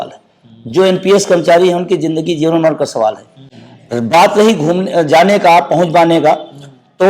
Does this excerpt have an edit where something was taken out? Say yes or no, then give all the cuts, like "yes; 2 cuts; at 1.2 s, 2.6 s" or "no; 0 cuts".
no; 0 cuts